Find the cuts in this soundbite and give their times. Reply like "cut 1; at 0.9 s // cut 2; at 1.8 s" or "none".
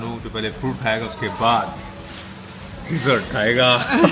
none